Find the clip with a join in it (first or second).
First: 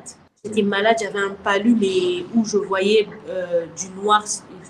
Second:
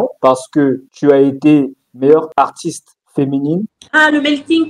second